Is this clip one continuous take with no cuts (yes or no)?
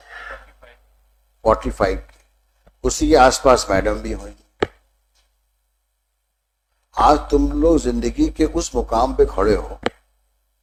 yes